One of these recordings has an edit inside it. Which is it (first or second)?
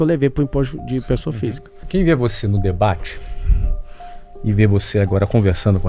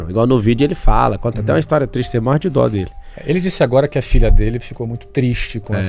first